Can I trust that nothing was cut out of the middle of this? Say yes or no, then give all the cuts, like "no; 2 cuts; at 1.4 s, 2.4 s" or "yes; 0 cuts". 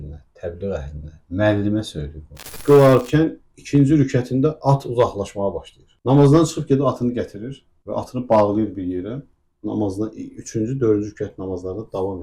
no; 1 cut; at 2.6 s